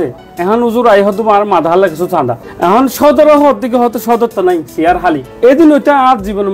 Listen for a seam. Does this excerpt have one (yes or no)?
yes